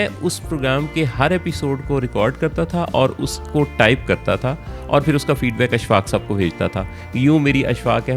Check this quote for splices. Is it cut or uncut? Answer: uncut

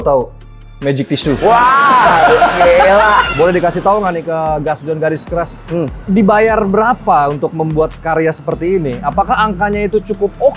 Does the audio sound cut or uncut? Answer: cut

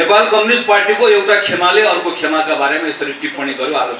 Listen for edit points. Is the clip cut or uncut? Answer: uncut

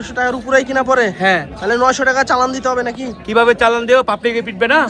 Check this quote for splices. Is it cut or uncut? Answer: uncut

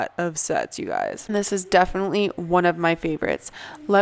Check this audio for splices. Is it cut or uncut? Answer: uncut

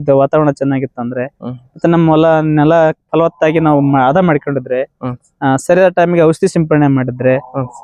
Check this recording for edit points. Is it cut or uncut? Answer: uncut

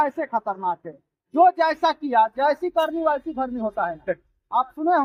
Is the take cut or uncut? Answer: uncut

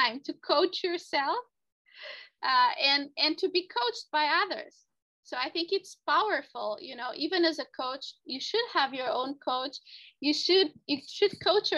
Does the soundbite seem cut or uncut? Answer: uncut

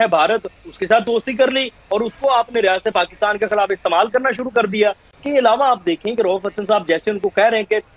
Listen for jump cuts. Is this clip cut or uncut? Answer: uncut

